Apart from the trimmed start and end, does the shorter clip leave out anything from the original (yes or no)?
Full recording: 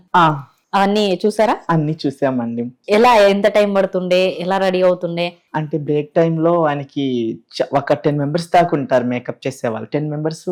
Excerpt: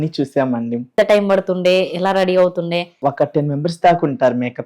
yes